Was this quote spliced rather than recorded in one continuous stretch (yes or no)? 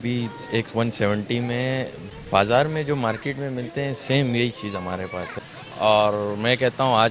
yes